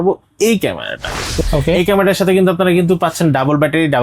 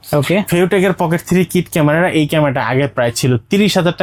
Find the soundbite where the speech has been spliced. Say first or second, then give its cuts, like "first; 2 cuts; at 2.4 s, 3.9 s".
first; 1 cut; at 1.4 s